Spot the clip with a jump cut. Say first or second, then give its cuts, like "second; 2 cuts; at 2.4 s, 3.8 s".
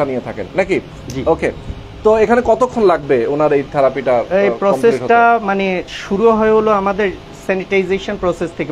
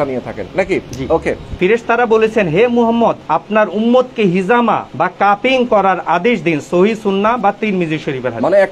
second; 3 cuts; at 1.2 s, 3.3 s, 4.9 s